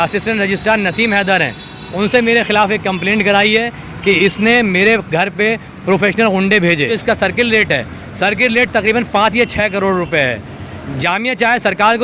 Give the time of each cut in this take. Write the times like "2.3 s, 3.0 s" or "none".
6.9 s